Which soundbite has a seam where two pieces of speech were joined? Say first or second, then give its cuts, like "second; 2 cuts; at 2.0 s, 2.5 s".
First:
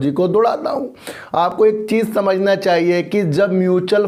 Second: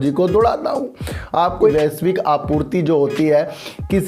second; 1 cut; at 1.5 s